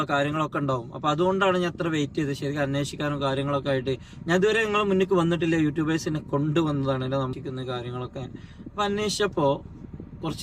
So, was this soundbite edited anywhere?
yes; 1 cut; at 7.3 s

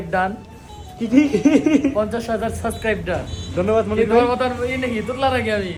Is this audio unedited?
yes; 0 cuts

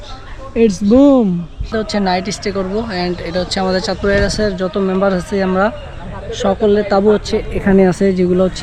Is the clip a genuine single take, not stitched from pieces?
no; 1 cut; at 1.7 s

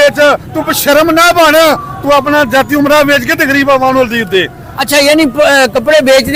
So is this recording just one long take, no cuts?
yes; 0 cuts

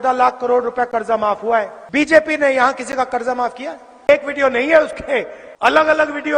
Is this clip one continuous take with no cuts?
no; 3 cuts; at 1.8 s, 4.1 s, 5.4 s

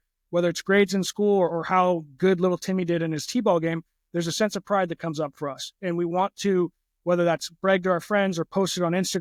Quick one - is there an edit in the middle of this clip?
no; 0 cuts

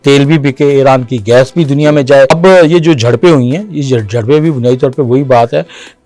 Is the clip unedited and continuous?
no; 1 cut; at 2.3 s

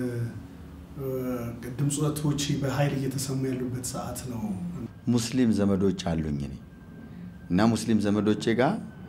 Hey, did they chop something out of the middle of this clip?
yes; 1 cut; at 4.8 s

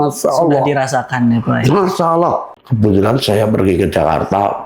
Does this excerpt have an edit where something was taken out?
yes; 1 cut; at 2.6 s

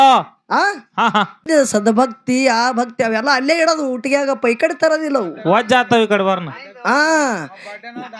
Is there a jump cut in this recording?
yes; 1 cut; at 1.4 s

